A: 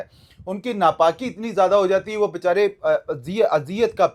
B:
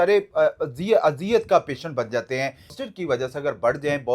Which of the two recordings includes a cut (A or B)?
B